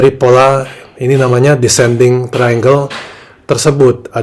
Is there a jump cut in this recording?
no; 0 cuts

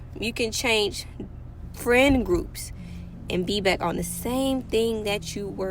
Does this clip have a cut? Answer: no; 0 cuts

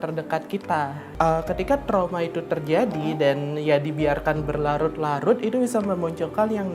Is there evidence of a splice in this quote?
yes; 1 cut; at 1.0 s

